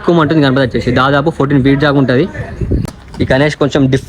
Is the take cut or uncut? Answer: cut